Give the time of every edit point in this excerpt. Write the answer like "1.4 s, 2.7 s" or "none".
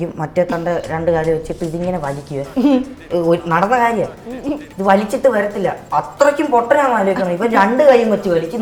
none